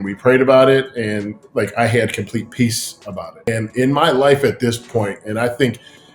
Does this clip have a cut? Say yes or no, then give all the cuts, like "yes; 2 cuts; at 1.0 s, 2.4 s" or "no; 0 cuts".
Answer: yes; 1 cut; at 3.5 s